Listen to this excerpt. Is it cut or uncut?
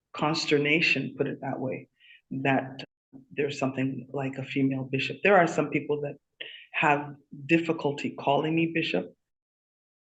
uncut